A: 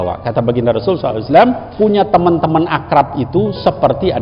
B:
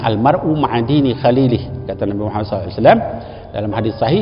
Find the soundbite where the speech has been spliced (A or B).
A